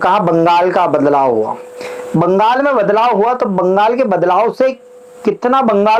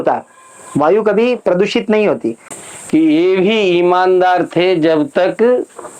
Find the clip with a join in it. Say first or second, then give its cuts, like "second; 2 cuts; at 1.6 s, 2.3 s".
second; 1 cut; at 2.5 s